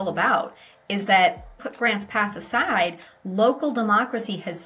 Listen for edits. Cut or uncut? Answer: cut